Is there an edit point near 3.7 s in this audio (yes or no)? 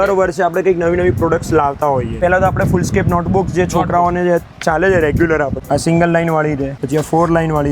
no